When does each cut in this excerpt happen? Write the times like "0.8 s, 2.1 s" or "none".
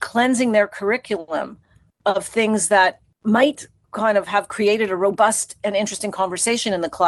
none